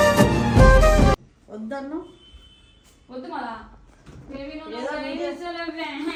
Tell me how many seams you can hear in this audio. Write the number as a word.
zero